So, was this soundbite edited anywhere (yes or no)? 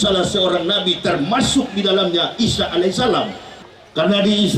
yes